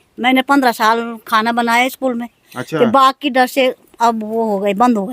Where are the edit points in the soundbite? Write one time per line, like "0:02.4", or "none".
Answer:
none